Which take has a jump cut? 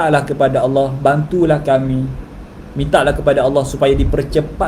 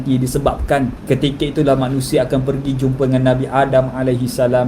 second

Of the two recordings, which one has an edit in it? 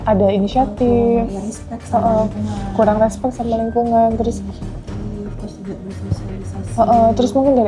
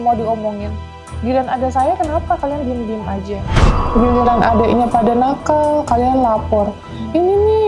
second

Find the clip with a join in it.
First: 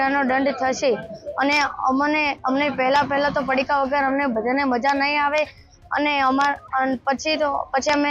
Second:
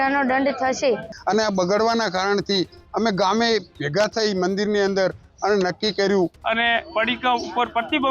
second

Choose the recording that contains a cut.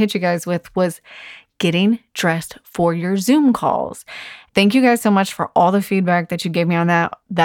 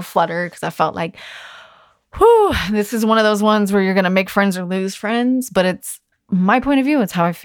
first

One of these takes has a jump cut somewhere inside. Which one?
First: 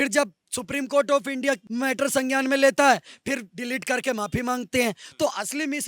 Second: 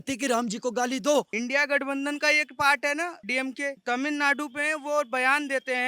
second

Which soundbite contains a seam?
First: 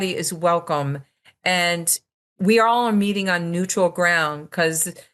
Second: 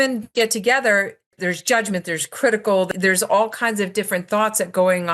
second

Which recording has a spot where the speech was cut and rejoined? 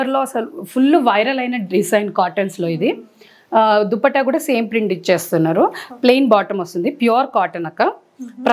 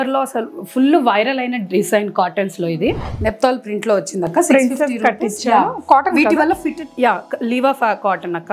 second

